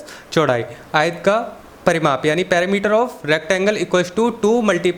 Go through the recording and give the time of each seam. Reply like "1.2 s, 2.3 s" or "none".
none